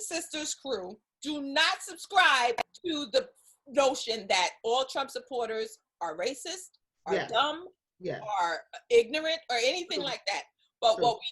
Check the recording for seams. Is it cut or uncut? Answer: cut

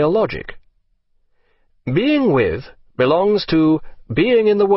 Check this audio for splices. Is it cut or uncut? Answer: cut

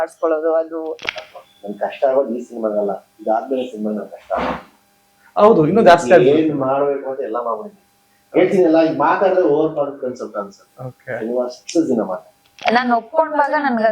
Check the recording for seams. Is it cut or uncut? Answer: cut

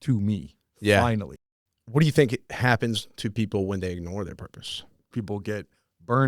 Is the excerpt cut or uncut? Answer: cut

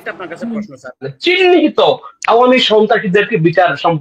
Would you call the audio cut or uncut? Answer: cut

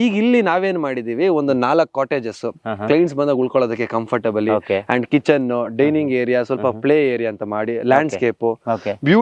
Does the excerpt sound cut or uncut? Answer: uncut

